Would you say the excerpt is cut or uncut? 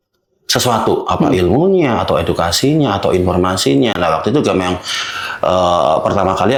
uncut